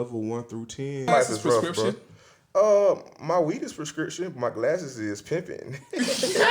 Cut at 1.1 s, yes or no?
yes